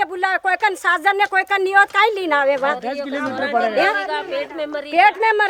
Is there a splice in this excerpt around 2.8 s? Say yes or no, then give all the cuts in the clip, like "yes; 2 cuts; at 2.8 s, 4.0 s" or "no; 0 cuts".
no; 0 cuts